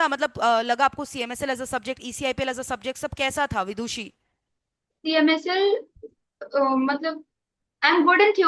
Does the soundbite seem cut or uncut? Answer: uncut